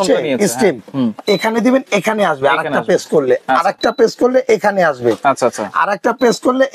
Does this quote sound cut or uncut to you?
uncut